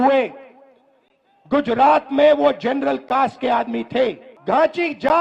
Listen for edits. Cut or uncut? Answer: cut